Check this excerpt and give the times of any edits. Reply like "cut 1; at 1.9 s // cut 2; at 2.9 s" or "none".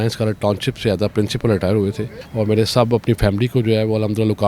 cut 1; at 2.1 s